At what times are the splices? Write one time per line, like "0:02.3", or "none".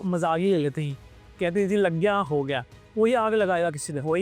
0:02.9

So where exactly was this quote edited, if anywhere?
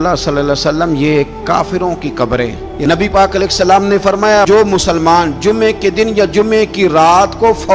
0:02.7

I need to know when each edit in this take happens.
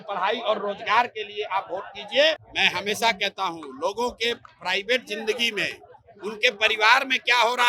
0:02.5

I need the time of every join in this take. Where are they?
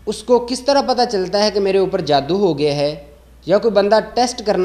none

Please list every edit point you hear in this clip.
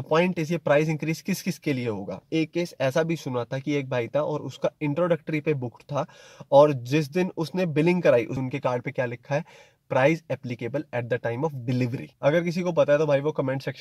0:02.3
0:08.3
0:12.1

